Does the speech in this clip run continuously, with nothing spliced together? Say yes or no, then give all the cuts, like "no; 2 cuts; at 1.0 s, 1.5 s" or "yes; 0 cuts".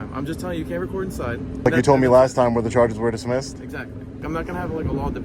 no; 2 cuts; at 1.7 s, 4.2 s